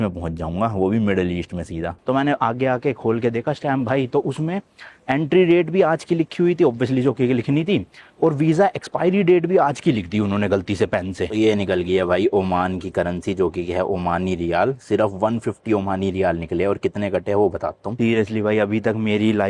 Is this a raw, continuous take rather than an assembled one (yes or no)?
no